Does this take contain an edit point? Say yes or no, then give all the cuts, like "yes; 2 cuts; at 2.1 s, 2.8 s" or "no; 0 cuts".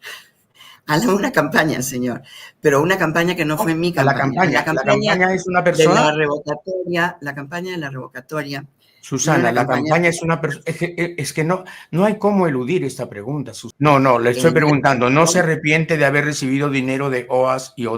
yes; 1 cut; at 13.6 s